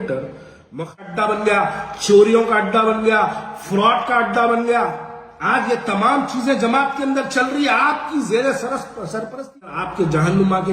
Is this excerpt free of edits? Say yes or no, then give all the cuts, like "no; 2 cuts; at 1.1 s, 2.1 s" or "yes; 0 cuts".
no; 2 cuts; at 1.0 s, 9.8 s